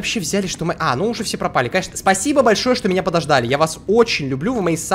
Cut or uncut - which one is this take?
uncut